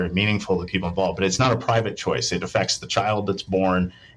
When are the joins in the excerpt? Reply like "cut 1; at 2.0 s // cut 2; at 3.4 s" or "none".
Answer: cut 1; at 1.3 s